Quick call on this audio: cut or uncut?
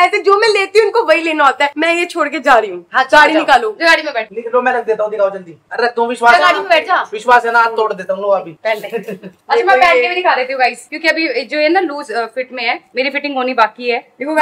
uncut